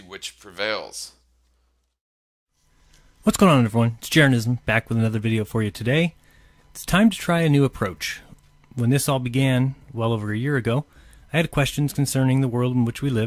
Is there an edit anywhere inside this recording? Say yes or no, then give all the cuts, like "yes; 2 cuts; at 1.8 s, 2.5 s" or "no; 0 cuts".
no; 0 cuts